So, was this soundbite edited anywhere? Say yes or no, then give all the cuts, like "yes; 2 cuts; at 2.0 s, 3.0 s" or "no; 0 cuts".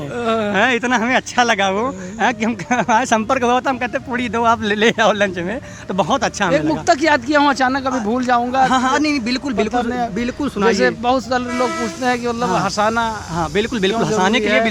no; 0 cuts